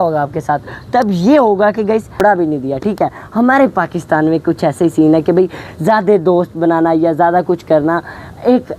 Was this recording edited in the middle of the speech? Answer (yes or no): yes